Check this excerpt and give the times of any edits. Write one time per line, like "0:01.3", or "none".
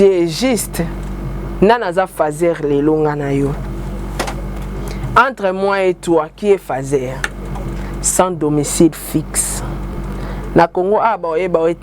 0:04.6
0:07.7
0:09.9